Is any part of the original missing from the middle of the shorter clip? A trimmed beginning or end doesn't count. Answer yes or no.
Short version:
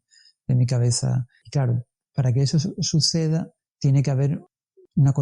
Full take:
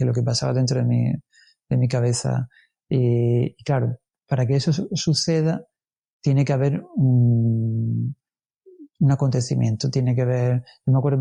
yes